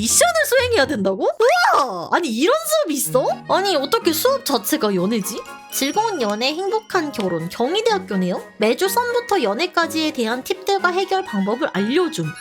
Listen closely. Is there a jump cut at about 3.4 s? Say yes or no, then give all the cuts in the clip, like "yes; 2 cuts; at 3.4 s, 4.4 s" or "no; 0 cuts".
no; 1 cut; at 5.6 s